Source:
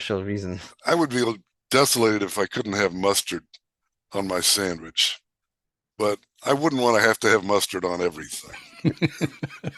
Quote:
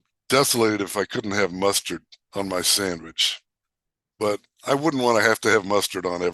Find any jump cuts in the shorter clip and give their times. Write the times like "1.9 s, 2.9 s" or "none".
2.2 s